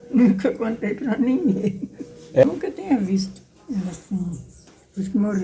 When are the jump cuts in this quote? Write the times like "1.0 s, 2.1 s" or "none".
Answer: 2.4 s